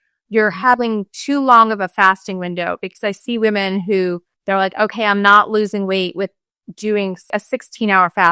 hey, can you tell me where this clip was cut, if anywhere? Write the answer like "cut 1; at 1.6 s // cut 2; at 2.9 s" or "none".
cut 1; at 4.3 s // cut 2; at 7.3 s